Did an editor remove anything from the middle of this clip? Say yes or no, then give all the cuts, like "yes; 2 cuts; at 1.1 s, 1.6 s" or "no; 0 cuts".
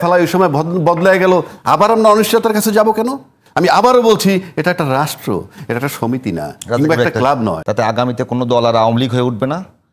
yes; 2 cuts; at 3.4 s, 7.6 s